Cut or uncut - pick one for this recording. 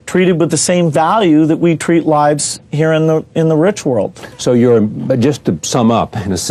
uncut